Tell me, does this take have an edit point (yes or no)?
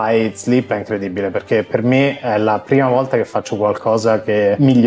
no